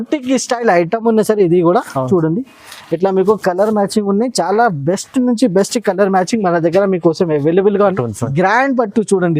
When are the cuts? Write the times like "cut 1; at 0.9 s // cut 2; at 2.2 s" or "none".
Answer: cut 1; at 8.0 s

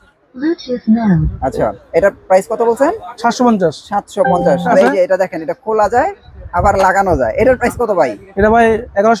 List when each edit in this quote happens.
cut 1; at 4.6 s

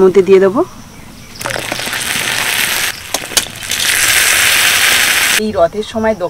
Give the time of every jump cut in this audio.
cut 1; at 2.9 s // cut 2; at 5.4 s

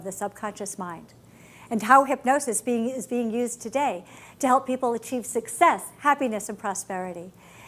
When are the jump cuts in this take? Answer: none

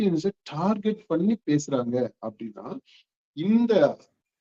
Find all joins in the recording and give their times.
none

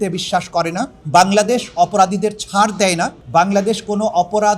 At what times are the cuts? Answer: cut 1; at 1.0 s // cut 2; at 3.2 s

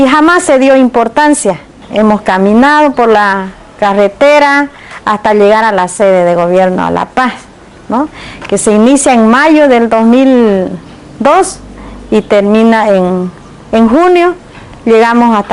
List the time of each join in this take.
cut 1; at 9.8 s

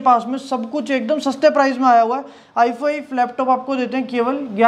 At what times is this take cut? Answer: none

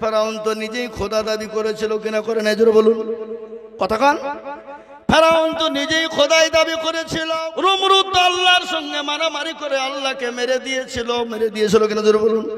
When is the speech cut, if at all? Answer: cut 1; at 7.1 s

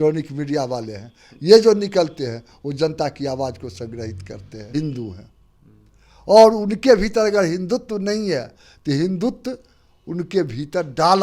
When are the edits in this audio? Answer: cut 1; at 4.7 s

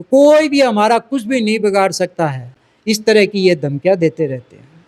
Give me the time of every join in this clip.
none

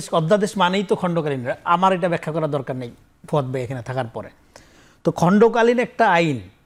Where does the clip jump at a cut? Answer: none

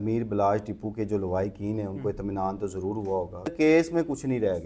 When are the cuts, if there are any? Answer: cut 1; at 3.5 s

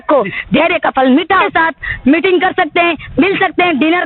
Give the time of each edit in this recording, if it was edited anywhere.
cut 1; at 1.5 s

